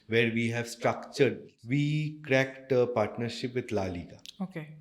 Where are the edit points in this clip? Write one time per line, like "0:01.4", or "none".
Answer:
0:01.5